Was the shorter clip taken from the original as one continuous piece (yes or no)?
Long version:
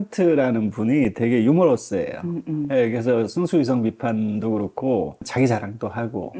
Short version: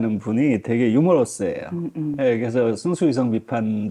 yes